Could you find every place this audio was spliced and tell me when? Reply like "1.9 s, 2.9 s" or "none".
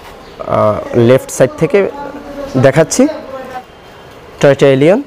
3.5 s